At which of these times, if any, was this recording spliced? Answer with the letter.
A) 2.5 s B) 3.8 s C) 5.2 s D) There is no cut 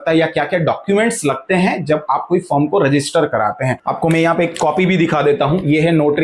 B